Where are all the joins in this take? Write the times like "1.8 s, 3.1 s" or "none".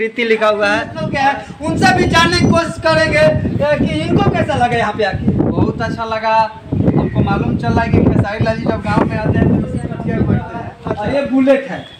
0.9 s, 10.8 s